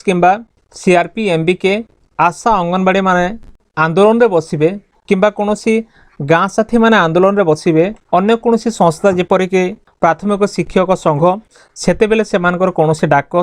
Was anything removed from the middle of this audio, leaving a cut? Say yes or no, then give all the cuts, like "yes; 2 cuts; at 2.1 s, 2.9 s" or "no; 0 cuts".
yes; 2 cuts; at 9.9 s, 11.6 s